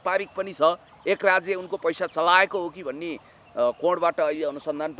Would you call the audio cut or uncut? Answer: uncut